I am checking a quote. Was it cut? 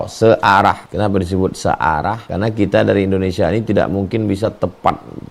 yes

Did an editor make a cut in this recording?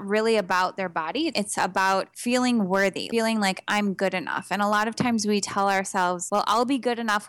yes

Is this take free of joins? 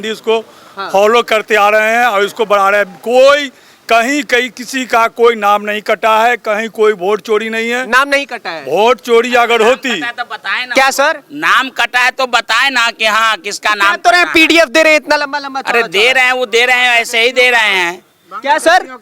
yes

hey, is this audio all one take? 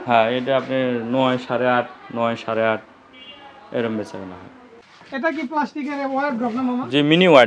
no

